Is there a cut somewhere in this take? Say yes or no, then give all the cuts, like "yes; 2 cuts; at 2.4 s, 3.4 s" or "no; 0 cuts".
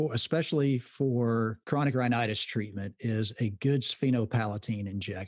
yes; 1 cut; at 1.6 s